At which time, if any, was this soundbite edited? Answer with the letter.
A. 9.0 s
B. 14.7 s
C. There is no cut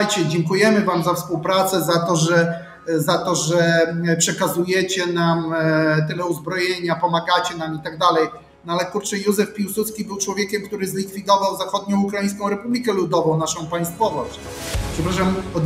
B